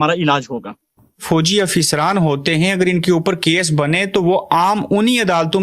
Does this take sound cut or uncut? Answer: cut